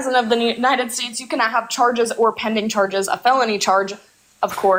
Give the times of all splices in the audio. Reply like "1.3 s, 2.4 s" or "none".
none

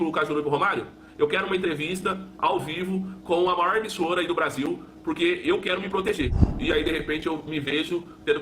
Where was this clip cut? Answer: 6.4 s

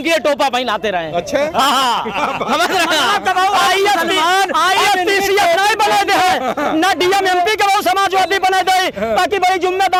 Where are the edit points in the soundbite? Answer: none

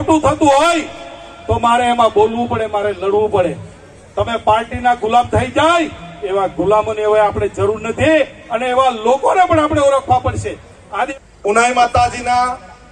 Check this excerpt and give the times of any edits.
11.1 s

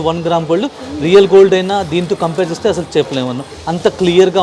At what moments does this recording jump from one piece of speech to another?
none

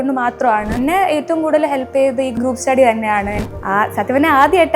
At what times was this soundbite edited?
0.8 s, 2.3 s, 3.4 s

